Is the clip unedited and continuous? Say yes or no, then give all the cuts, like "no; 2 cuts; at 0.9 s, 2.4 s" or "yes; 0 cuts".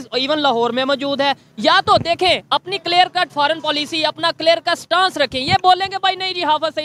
yes; 0 cuts